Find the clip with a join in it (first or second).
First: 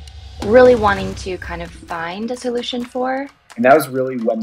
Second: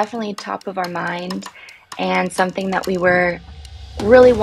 first